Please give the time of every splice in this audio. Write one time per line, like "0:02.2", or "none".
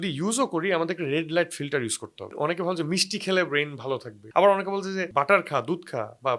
0:02.3
0:04.1
0:05.1